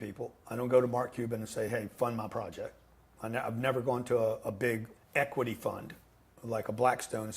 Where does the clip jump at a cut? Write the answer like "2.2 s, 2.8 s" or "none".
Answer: 4.9 s